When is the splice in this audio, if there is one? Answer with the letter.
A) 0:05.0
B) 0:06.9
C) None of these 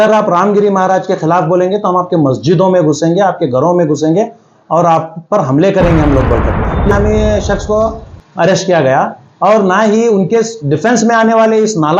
B